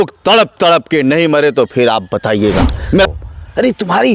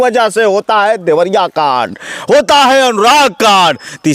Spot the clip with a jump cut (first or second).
first